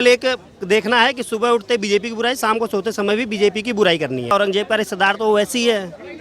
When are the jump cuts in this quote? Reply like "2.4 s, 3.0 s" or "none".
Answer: 4.3 s

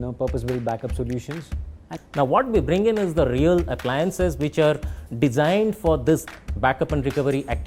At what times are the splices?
1.9 s

